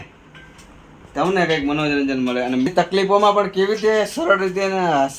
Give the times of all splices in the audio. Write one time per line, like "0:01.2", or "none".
0:02.7

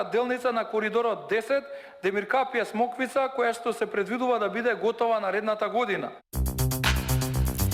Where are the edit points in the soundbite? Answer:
0:06.0

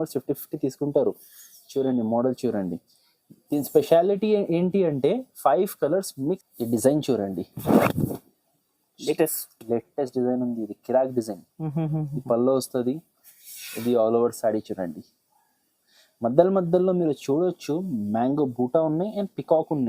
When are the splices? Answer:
0:06.1

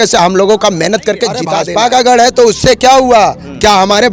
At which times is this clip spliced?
0:01.5

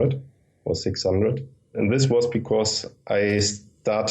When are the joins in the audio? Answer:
0:01.7

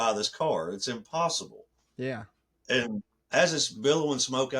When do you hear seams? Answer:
none

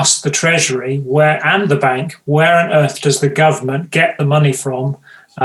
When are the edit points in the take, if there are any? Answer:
none

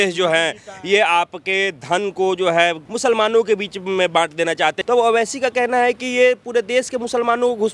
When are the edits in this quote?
0:02.8
0:04.8

